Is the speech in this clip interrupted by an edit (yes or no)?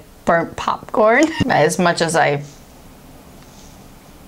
yes